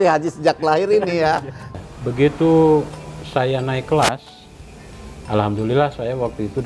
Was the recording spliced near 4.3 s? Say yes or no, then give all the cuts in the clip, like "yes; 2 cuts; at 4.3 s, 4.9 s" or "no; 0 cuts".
no; 1 cut; at 1.8 s